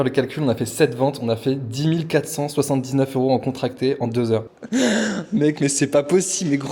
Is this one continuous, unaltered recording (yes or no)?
no